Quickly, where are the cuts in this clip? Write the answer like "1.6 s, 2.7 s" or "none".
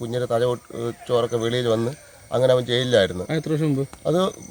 none